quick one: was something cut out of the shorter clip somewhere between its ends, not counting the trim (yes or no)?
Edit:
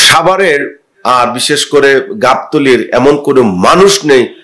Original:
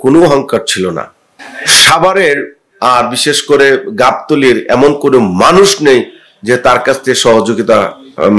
no